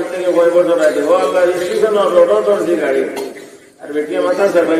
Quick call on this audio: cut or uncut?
uncut